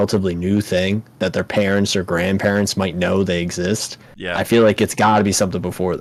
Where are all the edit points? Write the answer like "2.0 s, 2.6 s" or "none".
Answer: none

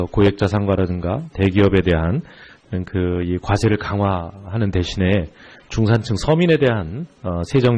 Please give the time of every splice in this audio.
none

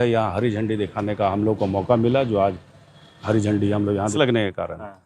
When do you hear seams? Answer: 4.1 s

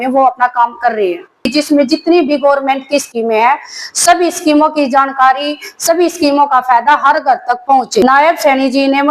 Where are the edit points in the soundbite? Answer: 1.5 s, 8.0 s

